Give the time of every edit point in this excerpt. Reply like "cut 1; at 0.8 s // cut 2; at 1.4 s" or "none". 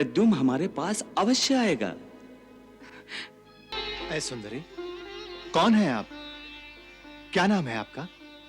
cut 1; at 3.7 s